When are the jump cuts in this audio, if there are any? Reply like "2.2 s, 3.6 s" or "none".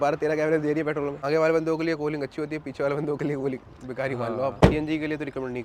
1.2 s, 4.5 s